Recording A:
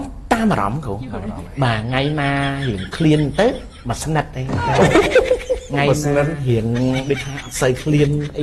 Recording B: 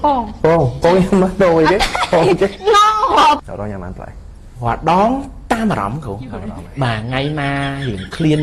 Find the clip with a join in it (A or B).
B